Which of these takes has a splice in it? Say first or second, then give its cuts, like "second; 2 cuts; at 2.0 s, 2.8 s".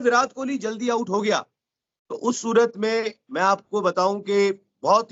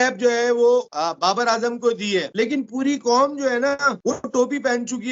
second; 3 cuts; at 0.9 s, 2.3 s, 4.0 s